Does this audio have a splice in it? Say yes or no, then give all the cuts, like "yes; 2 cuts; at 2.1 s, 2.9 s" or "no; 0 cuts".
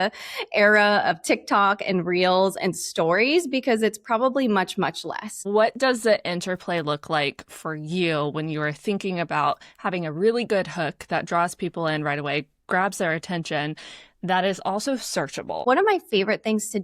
yes; 2 cuts; at 5.4 s, 15.6 s